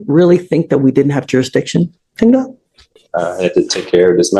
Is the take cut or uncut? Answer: uncut